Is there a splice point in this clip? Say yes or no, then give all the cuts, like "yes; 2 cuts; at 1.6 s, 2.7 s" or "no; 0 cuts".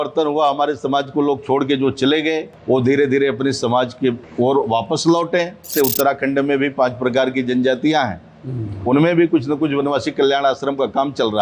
yes; 3 cuts; at 2.5 s, 4.2 s, 5.7 s